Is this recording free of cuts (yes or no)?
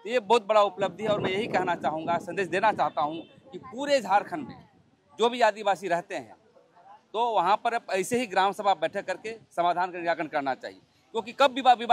yes